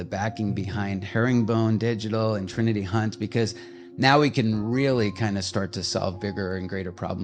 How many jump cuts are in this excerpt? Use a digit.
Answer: 0